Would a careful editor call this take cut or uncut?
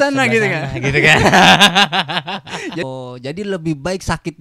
cut